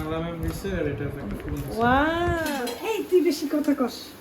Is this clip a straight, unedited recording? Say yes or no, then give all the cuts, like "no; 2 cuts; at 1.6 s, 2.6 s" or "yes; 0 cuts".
no; 1 cut; at 2.5 s